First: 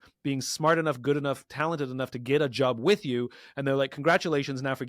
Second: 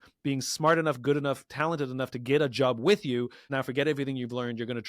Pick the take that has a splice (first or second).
second